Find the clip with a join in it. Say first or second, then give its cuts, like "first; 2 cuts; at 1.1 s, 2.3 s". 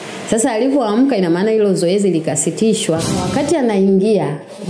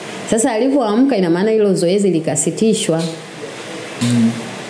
first; 1 cut; at 3.2 s